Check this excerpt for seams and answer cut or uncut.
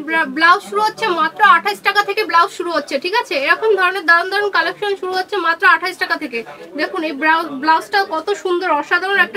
uncut